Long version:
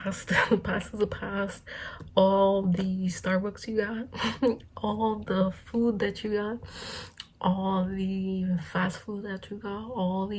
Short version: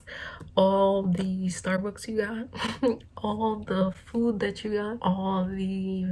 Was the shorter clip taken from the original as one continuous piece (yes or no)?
no